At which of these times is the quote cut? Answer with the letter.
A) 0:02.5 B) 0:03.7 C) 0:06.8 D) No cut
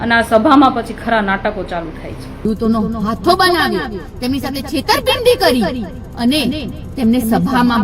A